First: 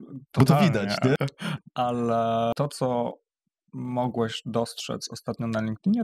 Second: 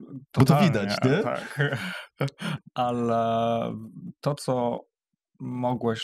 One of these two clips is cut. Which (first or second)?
first